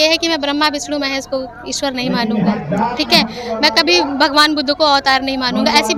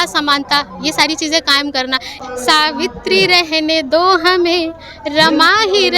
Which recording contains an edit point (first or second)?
second